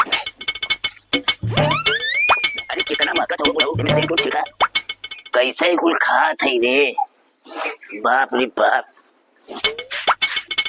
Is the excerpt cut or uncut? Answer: uncut